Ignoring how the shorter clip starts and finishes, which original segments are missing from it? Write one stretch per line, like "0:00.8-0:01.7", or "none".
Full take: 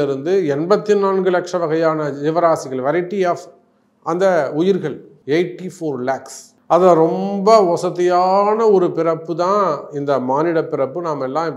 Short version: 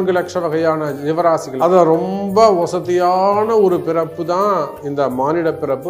0:02.7-0:06.6

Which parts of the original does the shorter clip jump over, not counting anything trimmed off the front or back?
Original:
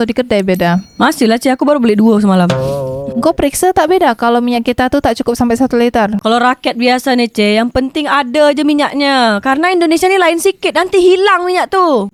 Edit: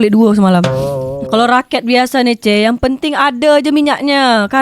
0:03.1-0:06.2

